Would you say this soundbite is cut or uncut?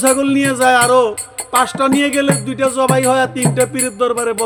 uncut